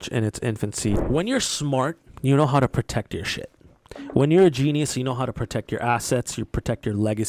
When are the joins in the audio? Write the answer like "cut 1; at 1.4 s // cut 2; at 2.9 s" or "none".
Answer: cut 1; at 1.0 s